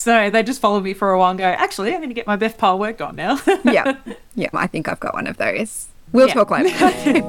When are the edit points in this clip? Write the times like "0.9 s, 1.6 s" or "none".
4.6 s

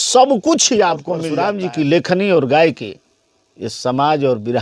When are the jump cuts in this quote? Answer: 1.3 s

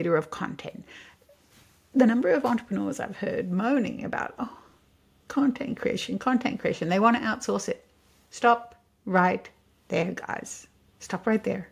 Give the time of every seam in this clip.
none

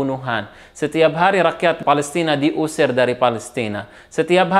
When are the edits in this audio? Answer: 1.8 s

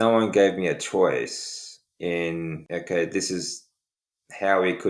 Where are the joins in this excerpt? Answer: 2.6 s

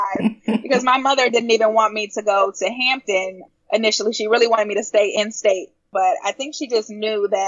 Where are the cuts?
5.9 s

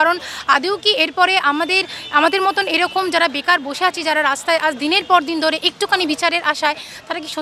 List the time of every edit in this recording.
none

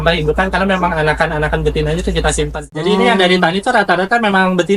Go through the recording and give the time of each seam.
2.7 s

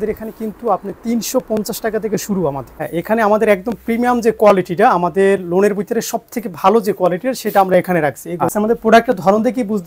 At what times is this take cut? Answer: 2.8 s, 8.5 s

